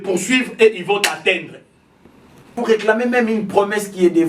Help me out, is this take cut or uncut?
cut